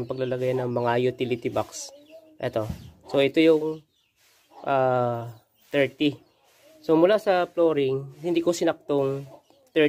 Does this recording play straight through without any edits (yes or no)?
yes